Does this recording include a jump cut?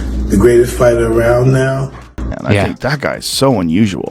yes; 1 cut; at 2.2 s

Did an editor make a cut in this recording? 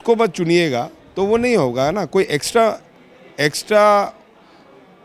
no; 0 cuts

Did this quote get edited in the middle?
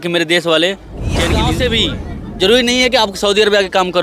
yes; 1 cut; at 1.4 s

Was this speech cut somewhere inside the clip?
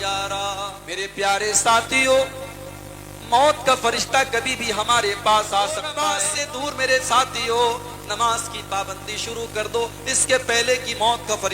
yes; 2 cuts; at 1.0 s, 6.0 s

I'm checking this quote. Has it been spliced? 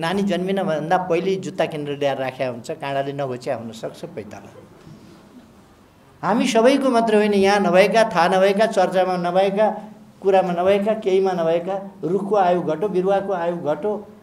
yes; 1 cut; at 5.8 s

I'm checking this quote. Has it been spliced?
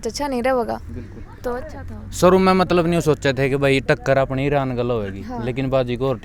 no; 0 cuts

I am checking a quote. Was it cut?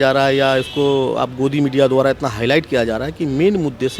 no; 0 cuts

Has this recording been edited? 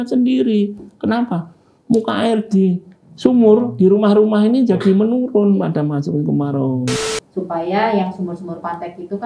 yes; 1 cut; at 7.0 s

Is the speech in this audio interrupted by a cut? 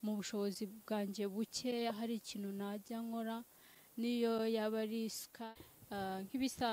yes; 1 cut; at 5.4 s

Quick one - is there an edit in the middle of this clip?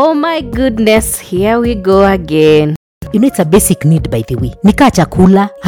yes; 1 cut; at 3.0 s

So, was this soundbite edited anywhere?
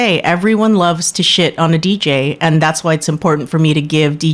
no; 0 cuts

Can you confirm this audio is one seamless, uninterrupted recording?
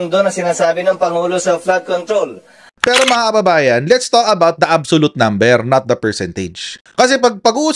no; 1 cut; at 2.7 s

